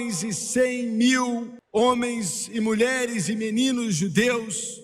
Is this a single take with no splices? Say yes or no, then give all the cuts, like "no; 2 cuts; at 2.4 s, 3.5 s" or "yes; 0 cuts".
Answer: no; 1 cut; at 1.6 s